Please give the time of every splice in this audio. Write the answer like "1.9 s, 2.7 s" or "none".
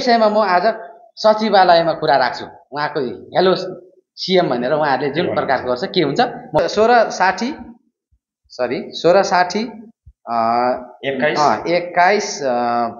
6.6 s